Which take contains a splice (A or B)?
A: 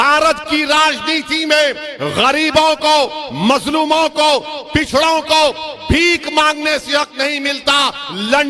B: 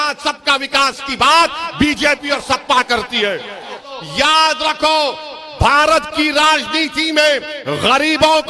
B